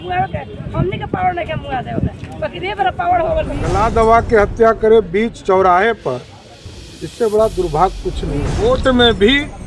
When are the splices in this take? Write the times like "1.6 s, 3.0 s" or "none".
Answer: 3.6 s, 8.5 s